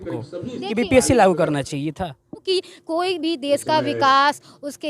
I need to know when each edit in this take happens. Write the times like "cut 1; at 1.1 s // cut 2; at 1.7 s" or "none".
cut 1; at 2.4 s